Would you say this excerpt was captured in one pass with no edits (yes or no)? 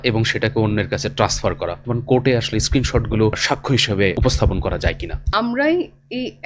no